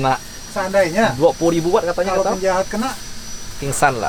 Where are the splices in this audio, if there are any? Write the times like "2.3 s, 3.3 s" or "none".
none